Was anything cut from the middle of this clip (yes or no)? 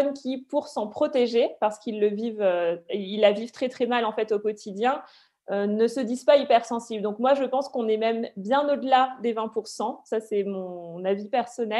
no